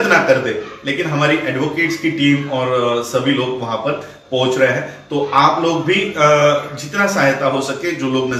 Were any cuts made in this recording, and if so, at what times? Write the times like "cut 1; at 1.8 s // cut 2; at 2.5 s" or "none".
none